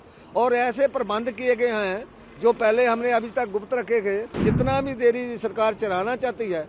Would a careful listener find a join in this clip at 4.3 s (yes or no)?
yes